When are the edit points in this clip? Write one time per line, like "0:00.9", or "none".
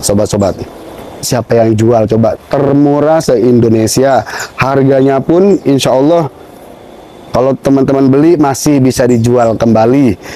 0:01.2